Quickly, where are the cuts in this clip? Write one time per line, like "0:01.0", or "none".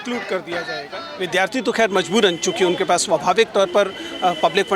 0:01.0